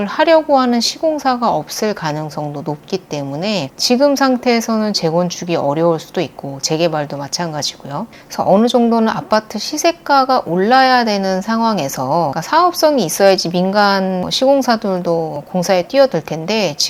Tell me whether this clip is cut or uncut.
uncut